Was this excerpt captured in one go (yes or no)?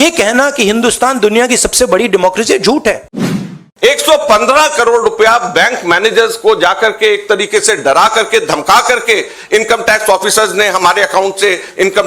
no